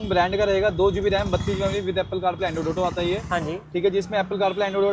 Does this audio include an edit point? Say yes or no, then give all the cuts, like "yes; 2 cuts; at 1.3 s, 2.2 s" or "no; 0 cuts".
no; 0 cuts